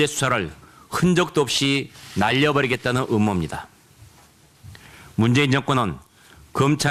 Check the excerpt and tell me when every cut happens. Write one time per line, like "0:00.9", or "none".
none